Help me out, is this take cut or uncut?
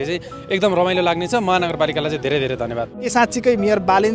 cut